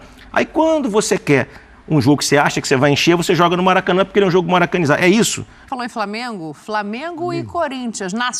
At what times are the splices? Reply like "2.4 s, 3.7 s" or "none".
5.6 s